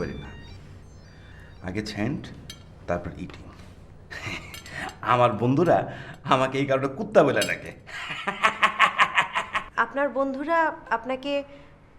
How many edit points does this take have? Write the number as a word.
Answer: one